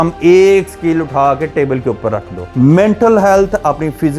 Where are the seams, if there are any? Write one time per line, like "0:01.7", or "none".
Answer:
none